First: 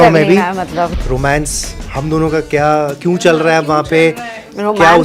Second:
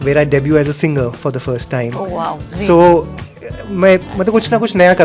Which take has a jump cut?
first; 1 cut; at 0.9 s

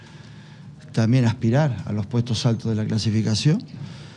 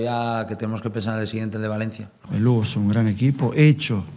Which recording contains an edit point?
second; 1 cut; at 2.2 s

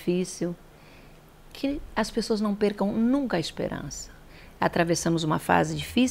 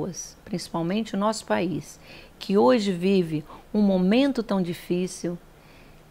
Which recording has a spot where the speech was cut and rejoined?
first; 1 cut; at 4.2 s

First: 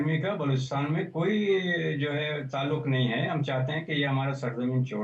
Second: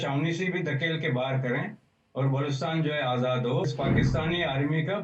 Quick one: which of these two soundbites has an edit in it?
second; 1 cut; at 3.6 s

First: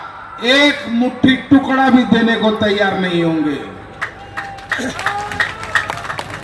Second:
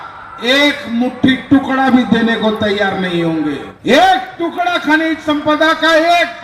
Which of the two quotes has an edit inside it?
second; 1 cut; at 3.7 s

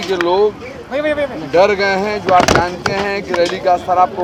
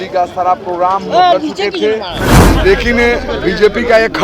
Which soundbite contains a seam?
second; 1 cut; at 2.3 s

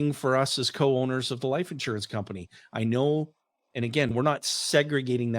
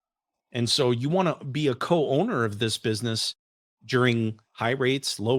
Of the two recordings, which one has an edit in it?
first; 1 cut; at 4.1 s

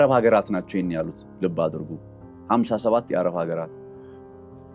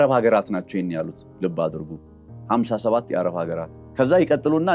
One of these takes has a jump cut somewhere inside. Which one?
second; 1 cut; at 3.8 s

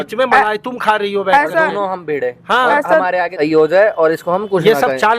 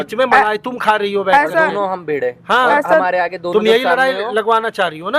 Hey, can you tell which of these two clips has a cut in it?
first; 1 cut; at 3.3 s

